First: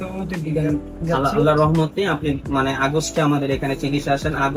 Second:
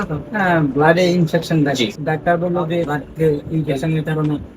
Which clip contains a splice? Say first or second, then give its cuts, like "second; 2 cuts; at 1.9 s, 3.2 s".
second; 2 cuts; at 2.0 s, 2.9 s